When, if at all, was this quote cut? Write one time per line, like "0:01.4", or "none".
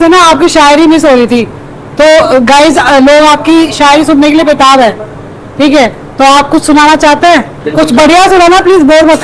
none